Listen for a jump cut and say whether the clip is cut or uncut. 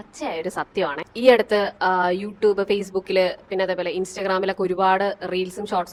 uncut